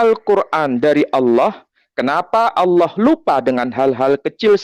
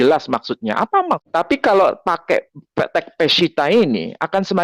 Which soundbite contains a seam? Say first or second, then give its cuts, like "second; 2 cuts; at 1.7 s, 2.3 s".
second; 1 cut; at 1.2 s